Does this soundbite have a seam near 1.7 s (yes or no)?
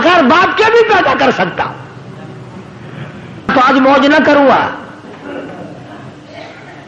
no